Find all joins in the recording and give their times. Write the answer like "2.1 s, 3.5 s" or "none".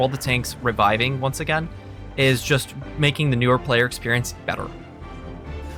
none